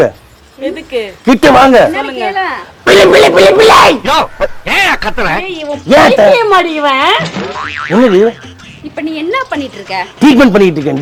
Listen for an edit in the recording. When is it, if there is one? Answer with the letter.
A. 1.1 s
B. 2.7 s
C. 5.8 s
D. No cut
D